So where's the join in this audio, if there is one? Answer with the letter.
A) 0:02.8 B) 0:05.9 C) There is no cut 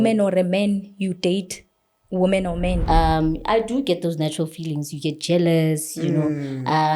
A